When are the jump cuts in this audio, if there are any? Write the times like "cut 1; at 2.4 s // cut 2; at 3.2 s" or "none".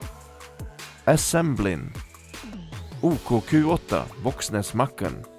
cut 1; at 1.0 s